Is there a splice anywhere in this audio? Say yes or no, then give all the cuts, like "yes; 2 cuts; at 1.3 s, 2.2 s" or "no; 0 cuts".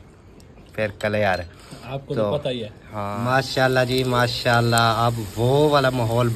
yes; 1 cut; at 3.0 s